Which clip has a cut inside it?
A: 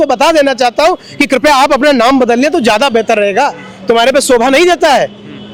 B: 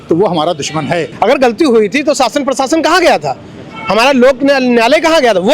B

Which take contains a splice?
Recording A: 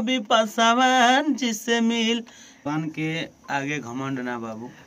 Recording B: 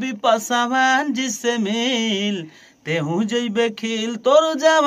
A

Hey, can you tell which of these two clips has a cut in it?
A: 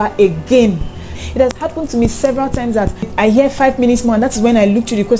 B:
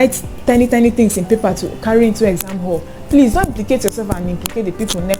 A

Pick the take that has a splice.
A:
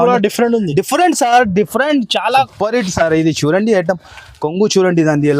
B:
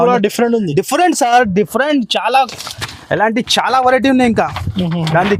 A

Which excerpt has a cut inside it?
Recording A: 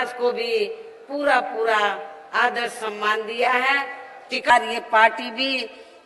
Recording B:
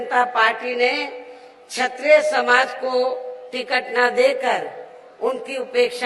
A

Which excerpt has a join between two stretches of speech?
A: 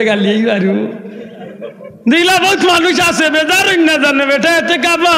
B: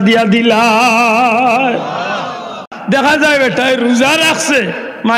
B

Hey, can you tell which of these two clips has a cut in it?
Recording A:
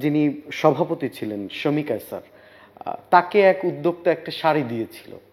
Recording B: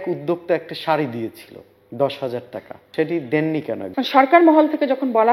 B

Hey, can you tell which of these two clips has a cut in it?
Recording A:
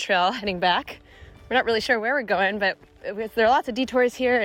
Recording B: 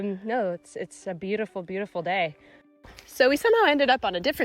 B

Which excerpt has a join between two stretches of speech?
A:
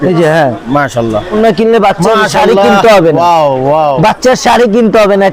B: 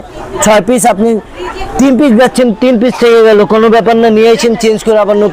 A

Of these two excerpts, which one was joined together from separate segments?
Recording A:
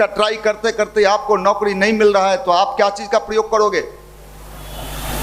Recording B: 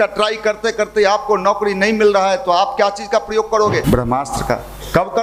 B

